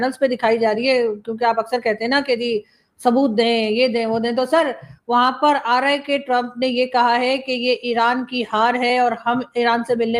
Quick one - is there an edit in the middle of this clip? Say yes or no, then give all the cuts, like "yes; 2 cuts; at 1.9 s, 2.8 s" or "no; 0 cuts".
no; 0 cuts